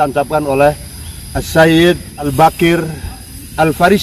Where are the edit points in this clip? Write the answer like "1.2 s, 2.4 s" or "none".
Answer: 2.3 s